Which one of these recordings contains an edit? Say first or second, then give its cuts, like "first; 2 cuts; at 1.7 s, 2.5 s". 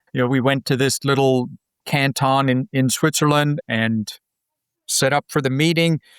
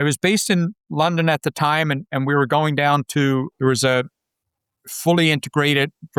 first; 1 cut; at 3.6 s